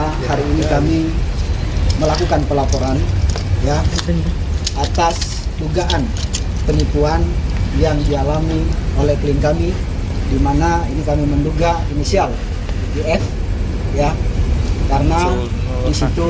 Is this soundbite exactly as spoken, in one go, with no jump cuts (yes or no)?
yes